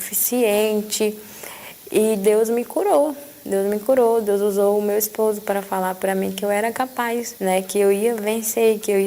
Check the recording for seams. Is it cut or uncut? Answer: cut